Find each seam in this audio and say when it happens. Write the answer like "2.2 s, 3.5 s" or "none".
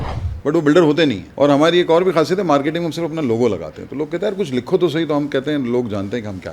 1.2 s